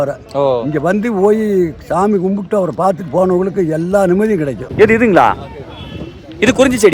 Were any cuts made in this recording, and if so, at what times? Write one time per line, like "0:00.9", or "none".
0:04.6